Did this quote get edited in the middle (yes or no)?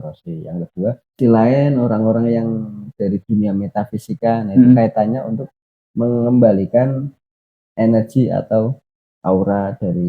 yes